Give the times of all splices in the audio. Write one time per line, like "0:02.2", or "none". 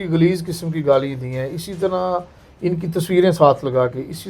none